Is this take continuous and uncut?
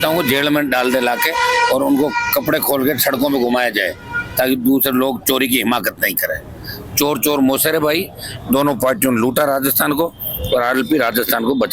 yes; 0 cuts

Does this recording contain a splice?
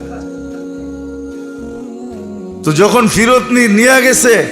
yes; 1 cut; at 2.6 s

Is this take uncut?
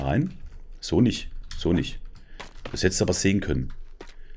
yes; 0 cuts

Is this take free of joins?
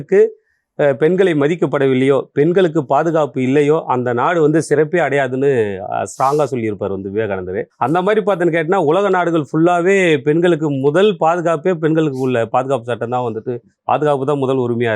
yes; 0 cuts

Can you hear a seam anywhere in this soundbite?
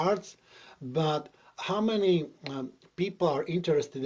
no; 0 cuts

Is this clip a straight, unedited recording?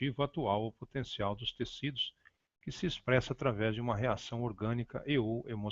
yes; 0 cuts

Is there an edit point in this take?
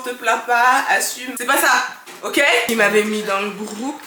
yes; 2 cuts; at 1.2 s, 2.7 s

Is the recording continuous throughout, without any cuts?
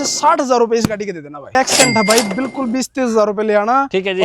no; 1 cut; at 1.5 s

